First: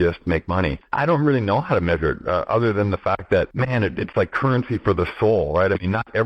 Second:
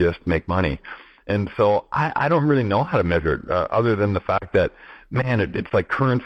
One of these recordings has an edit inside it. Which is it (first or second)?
first